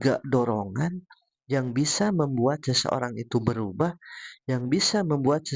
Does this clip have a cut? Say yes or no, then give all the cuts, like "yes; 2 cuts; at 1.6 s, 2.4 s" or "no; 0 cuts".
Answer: no; 0 cuts